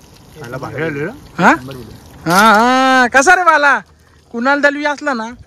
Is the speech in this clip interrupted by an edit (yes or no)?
no